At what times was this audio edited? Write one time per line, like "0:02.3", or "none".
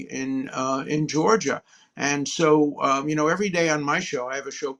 none